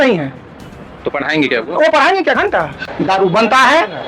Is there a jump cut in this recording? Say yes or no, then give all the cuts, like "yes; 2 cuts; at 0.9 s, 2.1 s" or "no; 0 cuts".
yes; 1 cut; at 2.8 s